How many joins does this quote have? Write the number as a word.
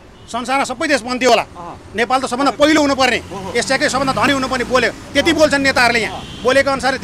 zero